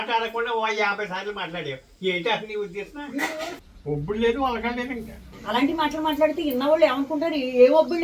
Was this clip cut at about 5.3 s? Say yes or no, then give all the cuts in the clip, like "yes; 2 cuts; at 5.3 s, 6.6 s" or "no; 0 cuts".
yes; 2 cuts; at 3.5 s, 5.3 s